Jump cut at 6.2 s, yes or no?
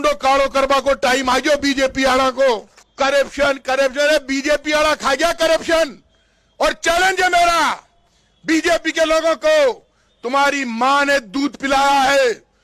no